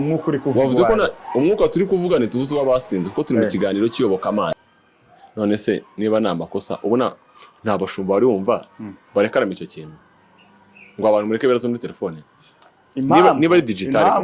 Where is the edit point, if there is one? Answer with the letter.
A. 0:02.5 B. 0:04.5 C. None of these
B